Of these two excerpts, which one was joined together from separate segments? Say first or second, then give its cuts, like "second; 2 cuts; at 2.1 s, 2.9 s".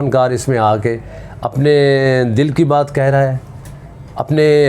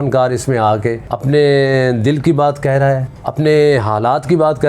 second; 2 cuts; at 1.1 s, 3.2 s